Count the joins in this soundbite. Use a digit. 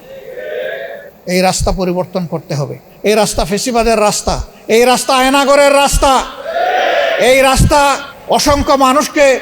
4